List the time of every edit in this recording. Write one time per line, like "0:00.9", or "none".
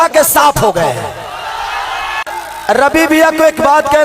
0:02.2